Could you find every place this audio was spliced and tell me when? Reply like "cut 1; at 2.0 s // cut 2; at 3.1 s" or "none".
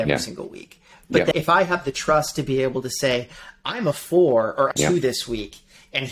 cut 1; at 1.3 s // cut 2; at 4.7 s